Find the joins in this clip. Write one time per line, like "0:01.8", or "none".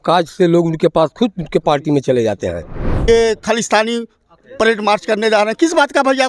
0:03.1